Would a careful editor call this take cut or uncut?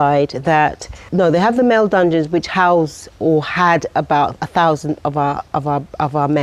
cut